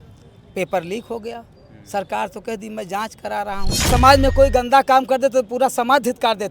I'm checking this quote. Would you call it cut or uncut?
cut